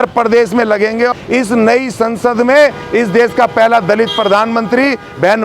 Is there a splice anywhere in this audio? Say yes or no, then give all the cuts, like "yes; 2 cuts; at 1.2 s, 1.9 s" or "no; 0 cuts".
yes; 1 cut; at 1.1 s